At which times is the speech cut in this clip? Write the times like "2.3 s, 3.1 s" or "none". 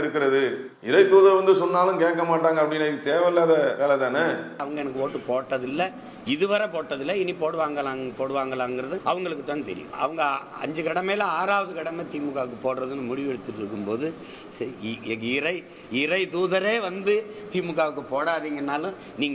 4.6 s, 9.0 s, 9.9 s